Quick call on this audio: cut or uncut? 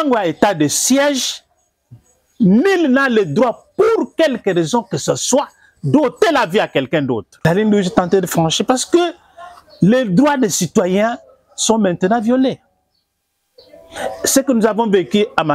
cut